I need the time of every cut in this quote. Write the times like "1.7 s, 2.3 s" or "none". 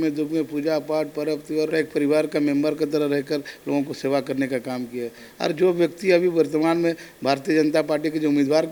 none